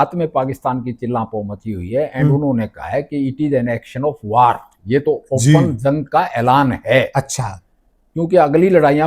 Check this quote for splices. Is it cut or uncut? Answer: uncut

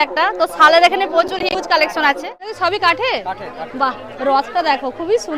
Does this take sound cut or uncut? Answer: cut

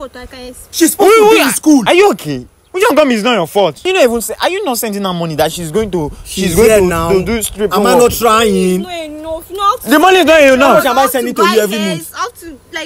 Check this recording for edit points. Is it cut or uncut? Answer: cut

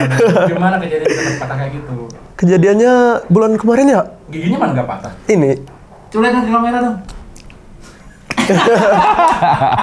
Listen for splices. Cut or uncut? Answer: cut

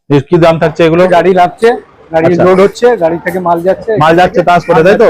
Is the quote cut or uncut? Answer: cut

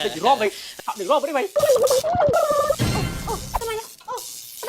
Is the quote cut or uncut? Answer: cut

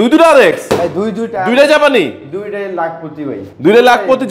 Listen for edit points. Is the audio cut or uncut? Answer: uncut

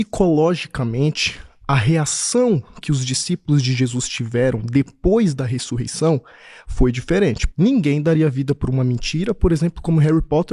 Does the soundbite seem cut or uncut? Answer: cut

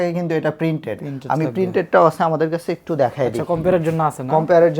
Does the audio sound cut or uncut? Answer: uncut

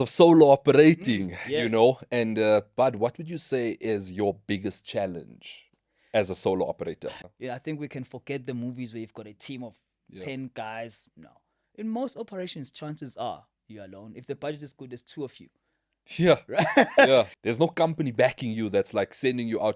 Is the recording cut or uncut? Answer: cut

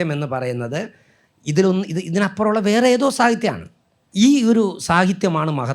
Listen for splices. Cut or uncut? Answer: cut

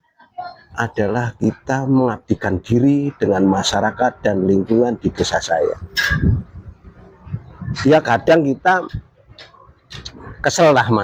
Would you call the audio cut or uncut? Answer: uncut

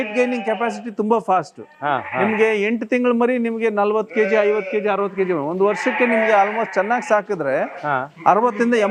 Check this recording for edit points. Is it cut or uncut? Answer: uncut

